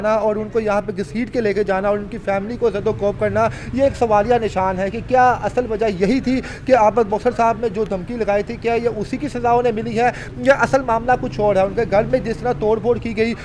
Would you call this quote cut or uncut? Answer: uncut